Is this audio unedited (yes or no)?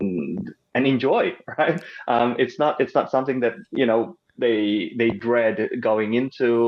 yes